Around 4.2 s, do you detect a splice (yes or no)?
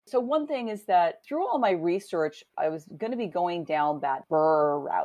yes